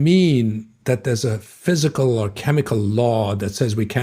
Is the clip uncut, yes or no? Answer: yes